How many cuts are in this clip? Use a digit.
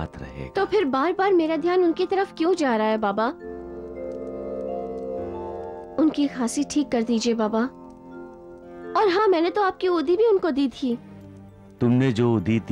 0